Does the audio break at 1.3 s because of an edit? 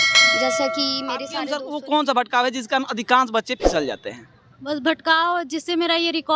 yes; 1 cut; at 1.3 s

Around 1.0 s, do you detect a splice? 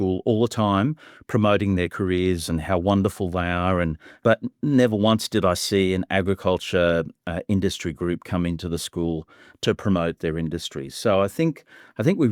no; 0 cuts

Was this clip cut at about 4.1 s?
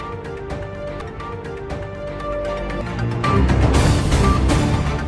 no; 1 cut; at 1.0 s

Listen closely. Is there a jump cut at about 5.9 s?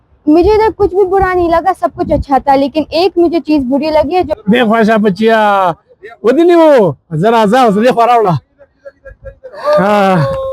no; 1 cut; at 4.3 s

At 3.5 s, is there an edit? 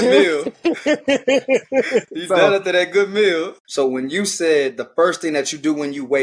yes; 1 cut; at 3.5 s

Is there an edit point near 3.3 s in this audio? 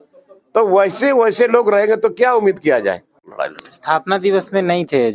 yes; 1 cut; at 3.3 s

